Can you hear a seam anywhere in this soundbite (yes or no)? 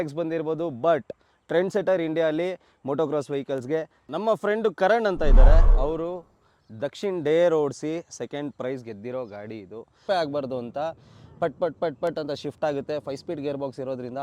yes